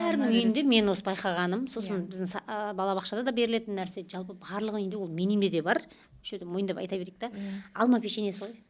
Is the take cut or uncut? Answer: uncut